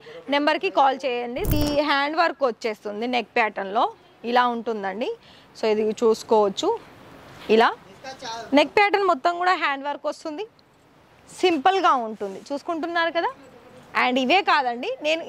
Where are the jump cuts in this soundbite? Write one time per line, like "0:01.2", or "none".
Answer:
0:01.5